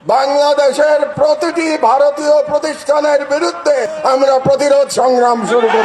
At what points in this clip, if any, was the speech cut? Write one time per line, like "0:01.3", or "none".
none